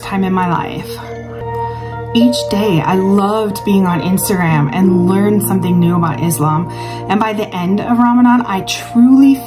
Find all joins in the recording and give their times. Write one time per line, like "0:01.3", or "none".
0:01.4